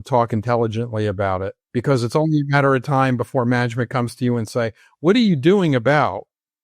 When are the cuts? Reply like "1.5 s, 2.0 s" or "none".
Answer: 2.1 s

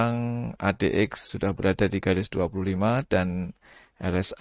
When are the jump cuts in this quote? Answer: none

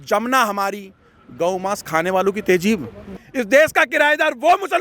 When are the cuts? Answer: 3.2 s

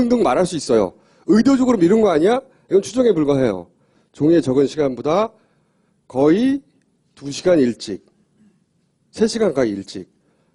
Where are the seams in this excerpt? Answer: 8.0 s

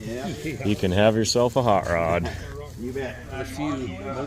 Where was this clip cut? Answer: 3.3 s

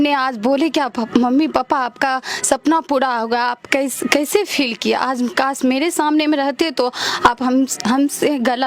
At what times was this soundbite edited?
none

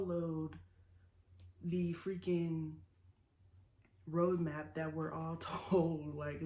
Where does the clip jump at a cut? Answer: none

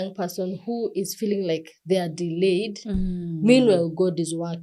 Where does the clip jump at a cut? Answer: none

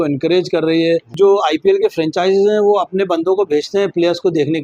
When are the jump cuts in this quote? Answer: 1.1 s

